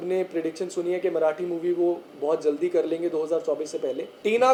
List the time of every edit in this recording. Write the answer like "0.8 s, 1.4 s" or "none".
none

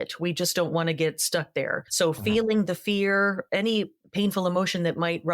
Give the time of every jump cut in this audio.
1.8 s, 4.0 s

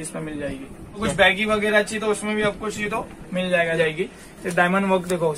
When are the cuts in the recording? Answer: 1.0 s, 3.8 s

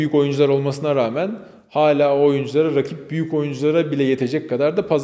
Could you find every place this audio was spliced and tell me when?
none

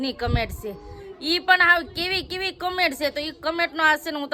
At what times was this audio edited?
none

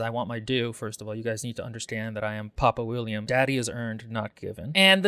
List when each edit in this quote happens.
3.2 s

